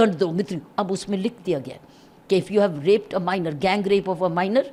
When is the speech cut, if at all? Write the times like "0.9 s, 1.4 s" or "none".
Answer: none